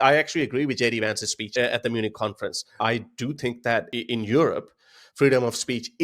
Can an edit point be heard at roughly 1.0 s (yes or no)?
no